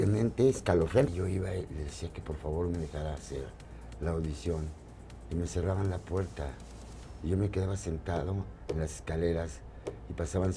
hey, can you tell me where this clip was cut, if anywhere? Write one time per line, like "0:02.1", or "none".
0:01.1